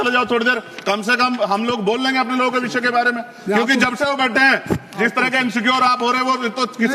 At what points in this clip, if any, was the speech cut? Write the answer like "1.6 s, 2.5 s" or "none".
none